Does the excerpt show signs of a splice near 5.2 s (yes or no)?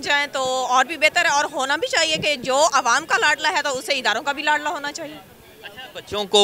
no